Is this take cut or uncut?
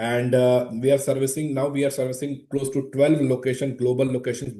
uncut